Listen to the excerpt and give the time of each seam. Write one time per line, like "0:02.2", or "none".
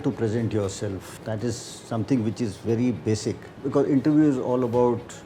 0:01.1
0:03.5